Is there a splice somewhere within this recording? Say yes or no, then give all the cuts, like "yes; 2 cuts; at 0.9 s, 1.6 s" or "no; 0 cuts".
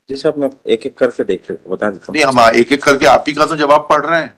no; 0 cuts